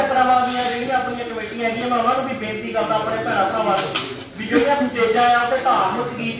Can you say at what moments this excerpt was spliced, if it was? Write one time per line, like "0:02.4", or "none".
none